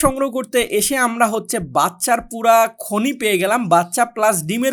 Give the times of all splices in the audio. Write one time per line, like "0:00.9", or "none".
none